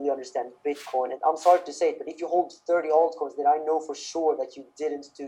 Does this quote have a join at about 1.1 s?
yes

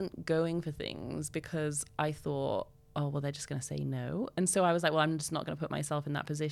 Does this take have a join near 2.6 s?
no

